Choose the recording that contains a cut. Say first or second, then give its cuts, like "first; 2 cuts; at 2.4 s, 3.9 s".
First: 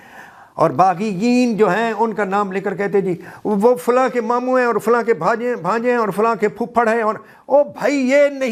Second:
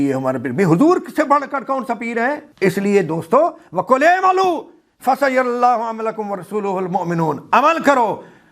second; 1 cut; at 2.5 s